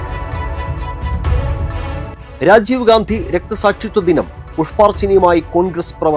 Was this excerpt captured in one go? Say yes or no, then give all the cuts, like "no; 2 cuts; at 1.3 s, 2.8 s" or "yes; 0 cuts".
yes; 0 cuts